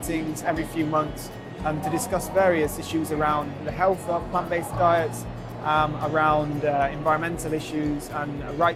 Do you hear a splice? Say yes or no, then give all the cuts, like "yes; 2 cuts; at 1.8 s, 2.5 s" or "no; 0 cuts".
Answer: no; 0 cuts